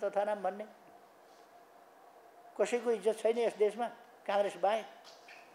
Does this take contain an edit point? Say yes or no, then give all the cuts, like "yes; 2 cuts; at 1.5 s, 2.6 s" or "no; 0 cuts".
no; 0 cuts